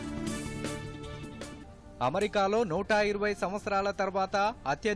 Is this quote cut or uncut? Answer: cut